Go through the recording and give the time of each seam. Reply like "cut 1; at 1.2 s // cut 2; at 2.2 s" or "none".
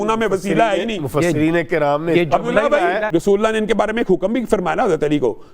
cut 1; at 3.1 s